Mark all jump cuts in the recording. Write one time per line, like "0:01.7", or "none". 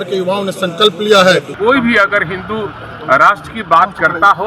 0:01.5